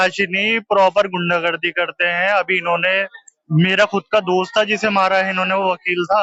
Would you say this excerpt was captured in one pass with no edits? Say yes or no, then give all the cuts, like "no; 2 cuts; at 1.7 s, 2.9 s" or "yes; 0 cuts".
yes; 0 cuts